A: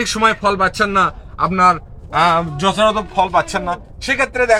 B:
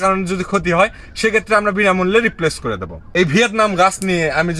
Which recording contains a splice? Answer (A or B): B